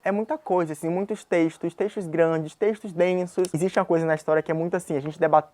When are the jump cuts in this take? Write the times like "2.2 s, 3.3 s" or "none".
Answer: 3.5 s